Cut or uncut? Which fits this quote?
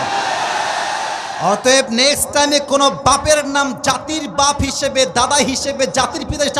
uncut